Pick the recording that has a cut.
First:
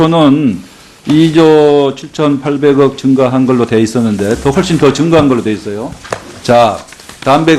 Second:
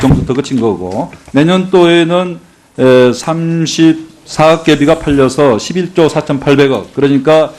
second; 1 cut; at 3.8 s

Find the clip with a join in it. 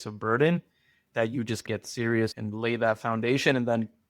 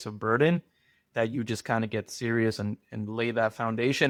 first; 2 cuts; at 1.6 s, 2.3 s

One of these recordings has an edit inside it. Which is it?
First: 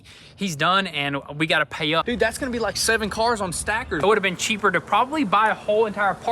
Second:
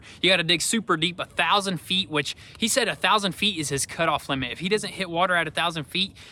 first; 2 cuts; at 2.0 s, 4.0 s

